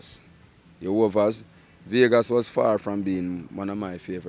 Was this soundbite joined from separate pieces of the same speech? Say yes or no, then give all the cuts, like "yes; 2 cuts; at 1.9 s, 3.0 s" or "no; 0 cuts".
no; 0 cuts